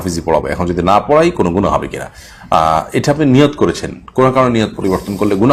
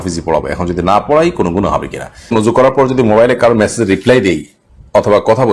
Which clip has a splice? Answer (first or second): second